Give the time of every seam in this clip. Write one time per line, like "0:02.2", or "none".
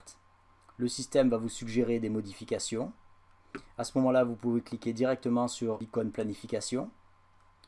0:05.8